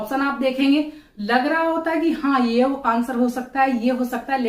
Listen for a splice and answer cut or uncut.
uncut